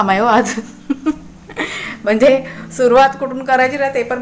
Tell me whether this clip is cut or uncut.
uncut